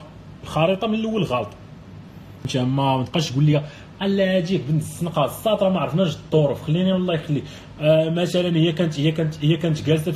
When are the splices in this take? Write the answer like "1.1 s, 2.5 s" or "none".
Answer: 2.5 s